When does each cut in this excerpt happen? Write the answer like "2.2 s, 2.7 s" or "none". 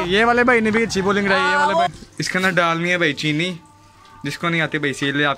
1.9 s